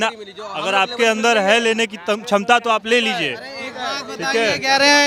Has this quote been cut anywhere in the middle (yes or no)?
no